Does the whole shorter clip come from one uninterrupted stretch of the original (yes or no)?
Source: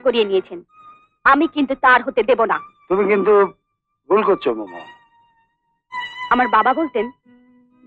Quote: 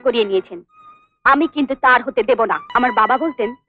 no